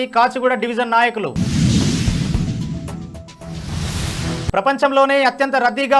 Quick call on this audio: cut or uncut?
uncut